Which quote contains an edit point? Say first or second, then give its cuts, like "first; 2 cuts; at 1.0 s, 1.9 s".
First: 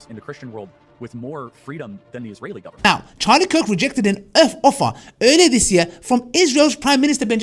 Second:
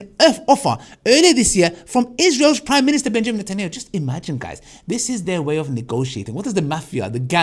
first; 1 cut; at 2.8 s